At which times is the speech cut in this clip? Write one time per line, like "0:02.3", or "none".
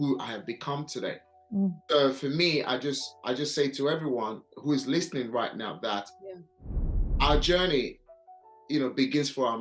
none